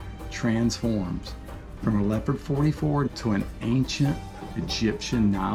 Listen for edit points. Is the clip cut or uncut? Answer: uncut